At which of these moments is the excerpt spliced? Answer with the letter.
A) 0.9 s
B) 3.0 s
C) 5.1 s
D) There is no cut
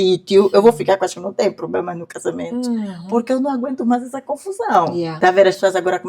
C